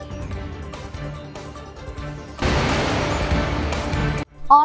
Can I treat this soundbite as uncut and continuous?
no; 1 cut; at 1.4 s

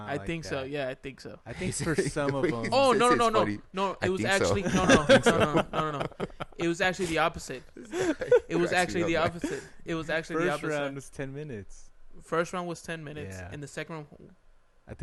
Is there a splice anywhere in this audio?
no; 0 cuts

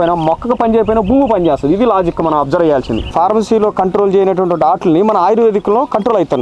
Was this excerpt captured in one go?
no; 1 cut; at 3.1 s

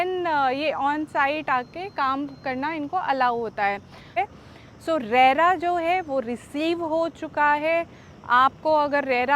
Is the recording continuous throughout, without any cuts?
no; 1 cut; at 4.2 s

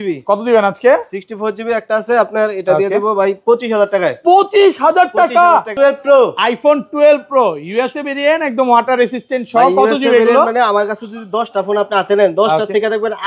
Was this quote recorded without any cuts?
no; 1 cut; at 5.7 s

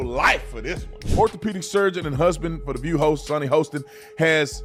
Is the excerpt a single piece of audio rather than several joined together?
yes; 0 cuts

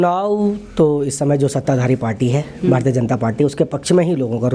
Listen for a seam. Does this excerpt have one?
no; 0 cuts

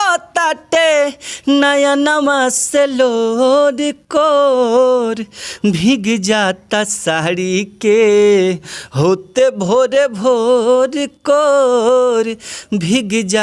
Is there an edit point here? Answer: no; 0 cuts

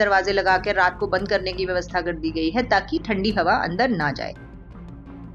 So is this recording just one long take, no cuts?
no; 1 cut; at 4.3 s

